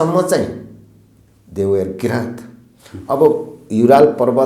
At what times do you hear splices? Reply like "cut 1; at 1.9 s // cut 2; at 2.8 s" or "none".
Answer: none